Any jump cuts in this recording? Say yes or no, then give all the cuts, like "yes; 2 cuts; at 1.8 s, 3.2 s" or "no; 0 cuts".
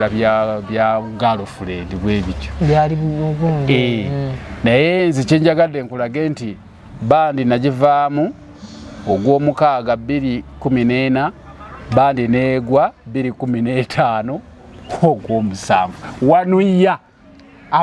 no; 0 cuts